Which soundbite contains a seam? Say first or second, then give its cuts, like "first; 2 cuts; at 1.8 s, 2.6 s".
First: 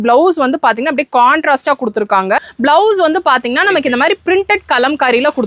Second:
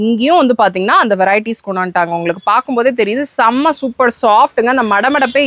first; 1 cut; at 2.5 s